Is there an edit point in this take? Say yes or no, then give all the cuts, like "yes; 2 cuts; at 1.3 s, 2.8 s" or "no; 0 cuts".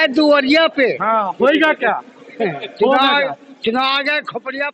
no; 0 cuts